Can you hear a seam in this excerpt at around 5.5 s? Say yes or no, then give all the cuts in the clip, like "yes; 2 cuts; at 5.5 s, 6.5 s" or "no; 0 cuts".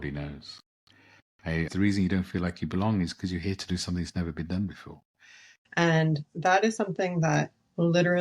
yes; 2 cuts; at 1.7 s, 5.5 s